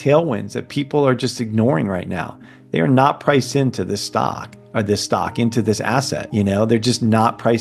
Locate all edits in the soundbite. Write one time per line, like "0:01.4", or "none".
0:06.2

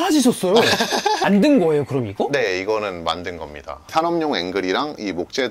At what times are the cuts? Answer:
0:01.2

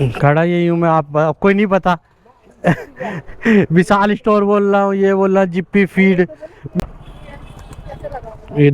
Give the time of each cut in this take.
0:06.7

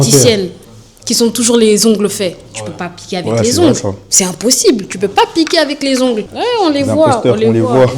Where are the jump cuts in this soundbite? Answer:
0:06.3

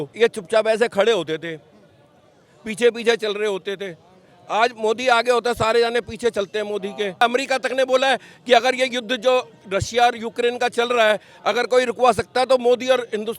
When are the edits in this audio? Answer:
0:07.2
0:09.6

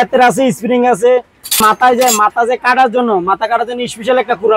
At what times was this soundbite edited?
0:01.6

